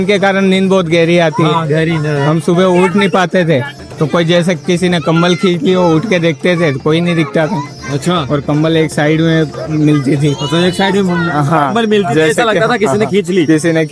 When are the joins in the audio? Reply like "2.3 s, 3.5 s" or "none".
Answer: none